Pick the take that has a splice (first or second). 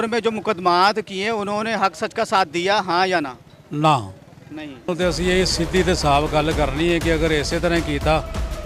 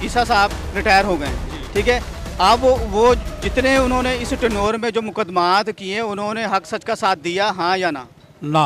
first